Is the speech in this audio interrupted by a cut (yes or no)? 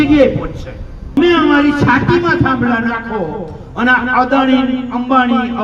yes